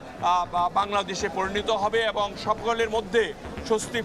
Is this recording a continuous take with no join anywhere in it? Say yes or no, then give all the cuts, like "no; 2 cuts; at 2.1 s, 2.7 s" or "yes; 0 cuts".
yes; 0 cuts